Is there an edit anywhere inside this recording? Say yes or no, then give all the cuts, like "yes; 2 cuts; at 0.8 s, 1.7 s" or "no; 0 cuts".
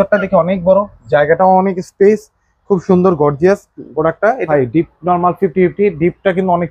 yes; 1 cut; at 4.5 s